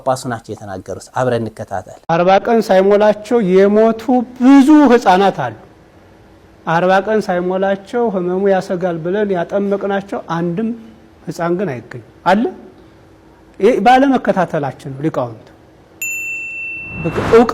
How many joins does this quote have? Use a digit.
1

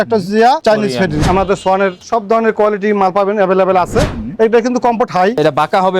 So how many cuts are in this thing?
2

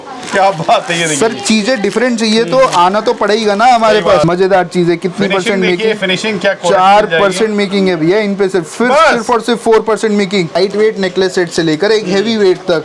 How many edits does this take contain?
2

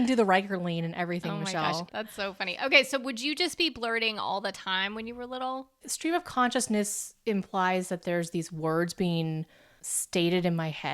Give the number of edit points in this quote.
2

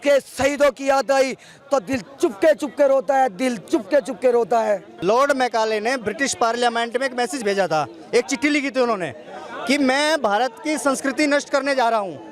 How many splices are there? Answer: 1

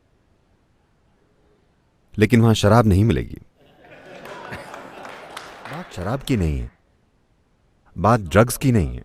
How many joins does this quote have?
1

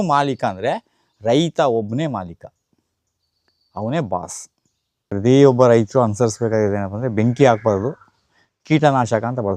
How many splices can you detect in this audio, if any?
1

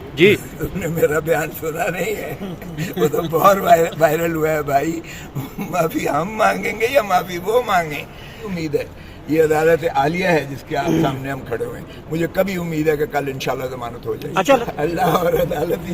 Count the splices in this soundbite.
2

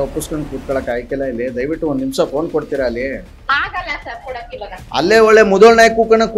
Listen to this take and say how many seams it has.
1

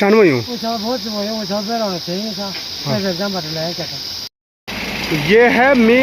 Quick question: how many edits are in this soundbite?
1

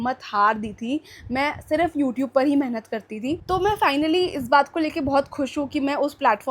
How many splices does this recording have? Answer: 0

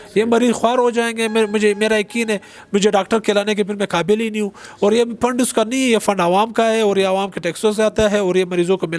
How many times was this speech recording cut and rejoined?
0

